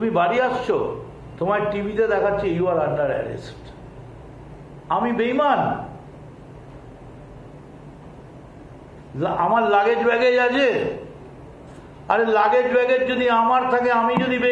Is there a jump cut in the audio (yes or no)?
yes